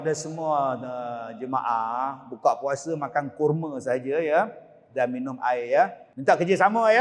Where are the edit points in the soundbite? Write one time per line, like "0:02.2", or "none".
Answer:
0:06.1